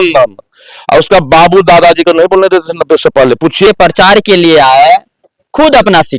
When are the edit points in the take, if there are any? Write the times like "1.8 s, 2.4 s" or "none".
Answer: 3.7 s